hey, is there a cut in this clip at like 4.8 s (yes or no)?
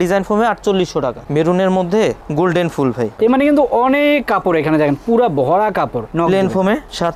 no